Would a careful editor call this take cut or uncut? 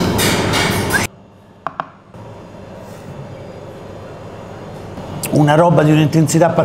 cut